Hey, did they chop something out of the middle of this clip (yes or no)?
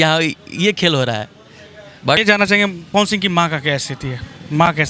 yes